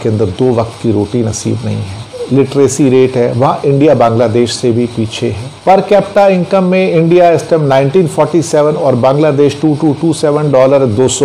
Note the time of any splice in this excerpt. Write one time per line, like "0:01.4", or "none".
0:02.2
0:05.5

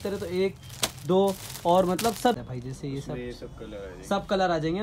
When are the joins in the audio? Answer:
0:02.3

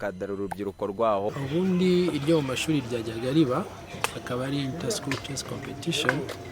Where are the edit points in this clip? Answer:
0:01.3

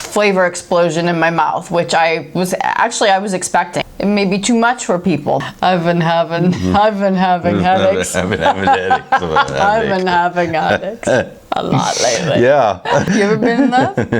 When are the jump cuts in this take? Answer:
0:03.8
0:05.4
0:13.1

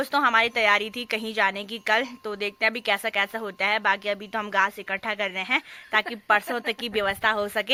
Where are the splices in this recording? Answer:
none

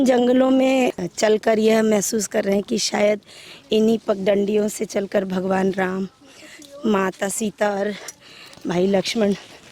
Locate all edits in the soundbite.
0:01.0

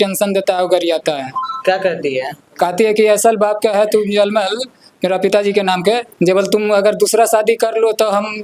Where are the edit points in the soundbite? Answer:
0:06.1

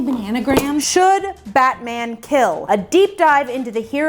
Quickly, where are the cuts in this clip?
0:00.8
0:02.6

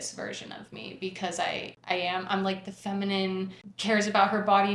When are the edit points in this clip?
0:01.8
0:03.6

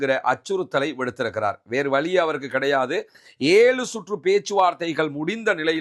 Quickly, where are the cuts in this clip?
0:03.2

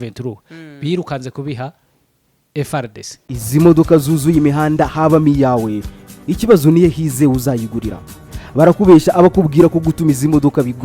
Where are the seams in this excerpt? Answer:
0:03.2

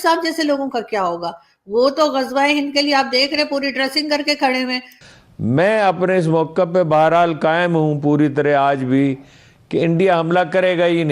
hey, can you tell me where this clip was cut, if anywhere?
0:05.0

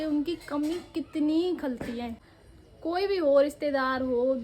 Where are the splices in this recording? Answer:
0:02.2

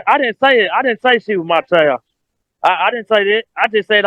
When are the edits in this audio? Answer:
none

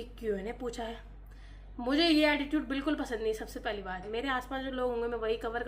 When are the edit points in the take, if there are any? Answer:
0:04.0

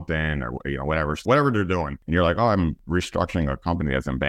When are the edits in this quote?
0:01.2
0:02.0
0:02.8

